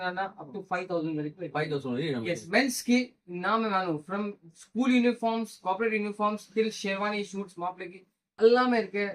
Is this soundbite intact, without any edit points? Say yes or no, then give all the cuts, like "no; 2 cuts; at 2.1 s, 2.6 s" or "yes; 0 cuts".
no; 1 cut; at 2.4 s